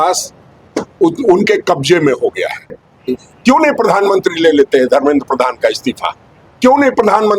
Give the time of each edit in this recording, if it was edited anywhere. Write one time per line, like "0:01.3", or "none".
0:02.9

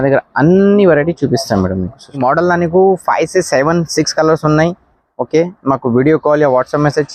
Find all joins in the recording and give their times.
0:02.2

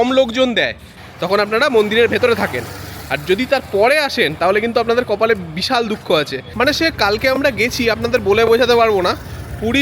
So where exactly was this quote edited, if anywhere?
0:01.0
0:06.4

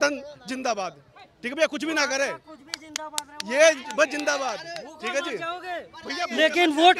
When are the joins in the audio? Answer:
none

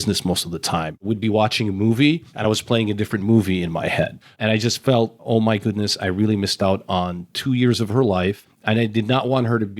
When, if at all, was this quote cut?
0:01.0
0:04.2
0:05.2

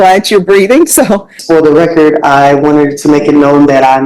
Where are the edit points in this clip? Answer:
0:01.4

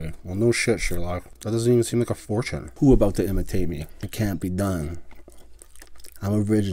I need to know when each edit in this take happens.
0:01.3
0:02.6
0:04.0

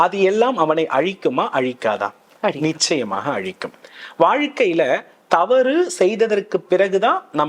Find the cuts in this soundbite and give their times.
none

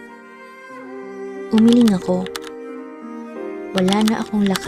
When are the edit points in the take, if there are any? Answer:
none

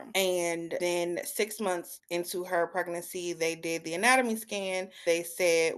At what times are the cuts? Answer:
0:00.8
0:01.9
0:05.0

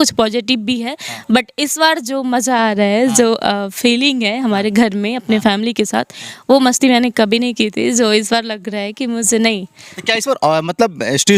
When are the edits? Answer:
none

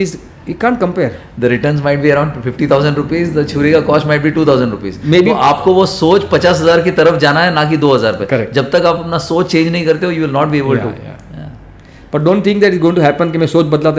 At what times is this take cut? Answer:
none

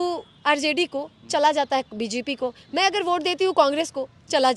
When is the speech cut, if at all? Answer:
none

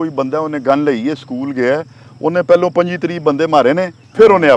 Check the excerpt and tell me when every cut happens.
none

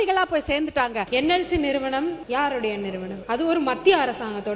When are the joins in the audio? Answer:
0:01.0
0:02.2
0:03.2

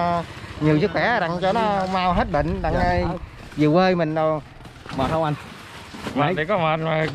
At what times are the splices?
0:04.8

